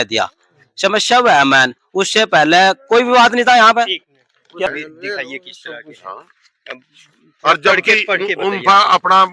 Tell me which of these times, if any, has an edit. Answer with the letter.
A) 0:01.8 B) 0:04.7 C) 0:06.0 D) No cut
B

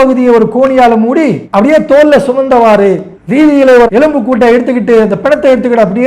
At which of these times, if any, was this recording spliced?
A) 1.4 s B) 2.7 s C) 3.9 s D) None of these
C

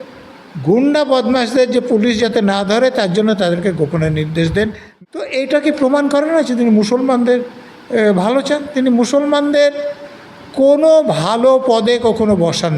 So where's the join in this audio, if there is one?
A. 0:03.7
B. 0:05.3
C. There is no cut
B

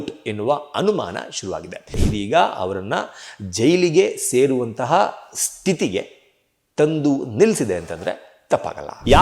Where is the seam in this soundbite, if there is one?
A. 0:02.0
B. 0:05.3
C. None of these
A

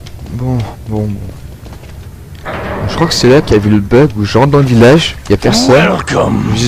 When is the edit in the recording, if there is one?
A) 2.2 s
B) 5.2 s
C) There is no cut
A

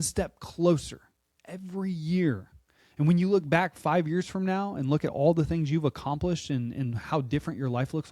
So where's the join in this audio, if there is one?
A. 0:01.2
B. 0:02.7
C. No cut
C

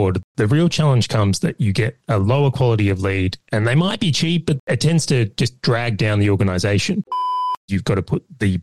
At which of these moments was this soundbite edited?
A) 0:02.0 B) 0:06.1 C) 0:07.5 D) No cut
C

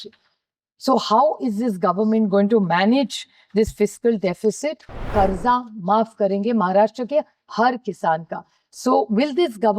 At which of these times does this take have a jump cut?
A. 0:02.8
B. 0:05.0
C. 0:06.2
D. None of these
B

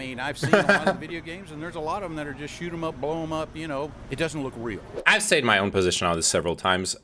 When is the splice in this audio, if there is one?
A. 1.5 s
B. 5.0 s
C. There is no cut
B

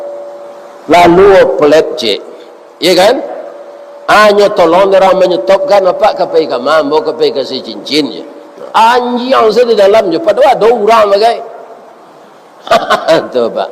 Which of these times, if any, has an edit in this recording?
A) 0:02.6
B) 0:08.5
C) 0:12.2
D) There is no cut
B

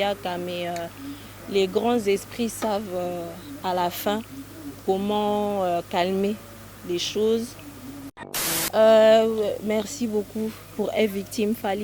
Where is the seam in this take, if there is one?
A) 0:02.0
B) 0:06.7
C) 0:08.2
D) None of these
C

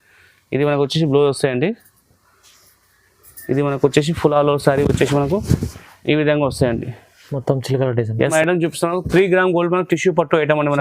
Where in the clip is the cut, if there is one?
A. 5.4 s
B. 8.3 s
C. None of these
B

